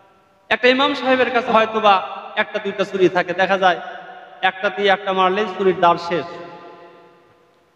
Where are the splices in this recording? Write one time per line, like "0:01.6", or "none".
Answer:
0:01.5